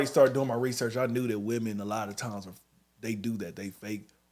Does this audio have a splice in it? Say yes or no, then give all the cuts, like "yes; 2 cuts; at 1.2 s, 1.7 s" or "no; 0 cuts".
no; 0 cuts